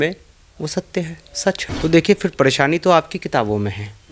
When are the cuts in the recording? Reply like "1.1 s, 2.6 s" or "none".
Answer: 1.7 s

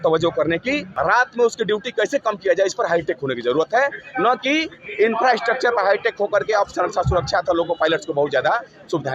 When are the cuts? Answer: 0.9 s

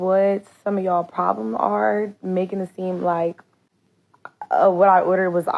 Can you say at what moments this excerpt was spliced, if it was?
none

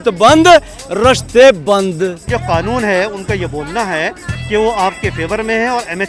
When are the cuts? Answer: 2.3 s

